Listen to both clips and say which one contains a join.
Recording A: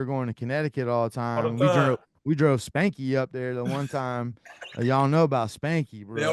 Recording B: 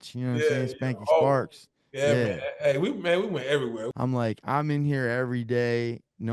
B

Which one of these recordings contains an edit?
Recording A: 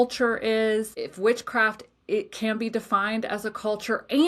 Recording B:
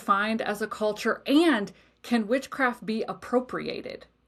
A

